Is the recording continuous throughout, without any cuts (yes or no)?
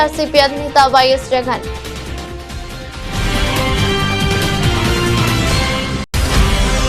no